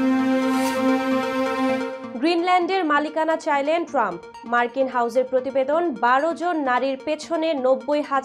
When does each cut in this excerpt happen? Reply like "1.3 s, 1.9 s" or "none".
2.0 s